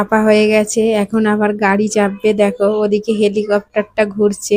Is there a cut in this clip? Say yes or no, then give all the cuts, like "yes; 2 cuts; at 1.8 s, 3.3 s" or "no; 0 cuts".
no; 0 cuts